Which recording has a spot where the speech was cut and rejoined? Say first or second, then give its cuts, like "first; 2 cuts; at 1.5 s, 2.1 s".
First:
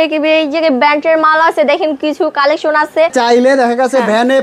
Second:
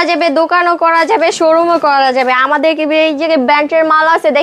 first; 1 cut; at 3.1 s